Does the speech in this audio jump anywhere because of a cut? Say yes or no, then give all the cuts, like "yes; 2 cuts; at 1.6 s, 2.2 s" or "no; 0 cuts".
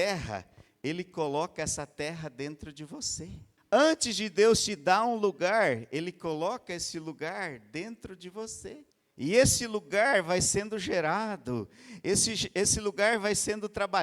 yes; 2 cuts; at 3.5 s, 9.0 s